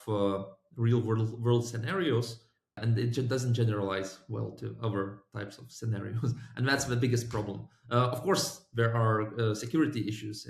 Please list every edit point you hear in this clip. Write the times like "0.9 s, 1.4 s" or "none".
2.8 s